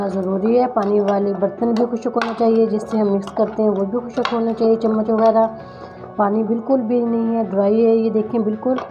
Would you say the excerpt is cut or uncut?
uncut